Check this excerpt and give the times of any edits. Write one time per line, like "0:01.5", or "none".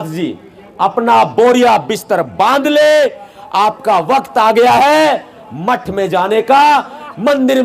none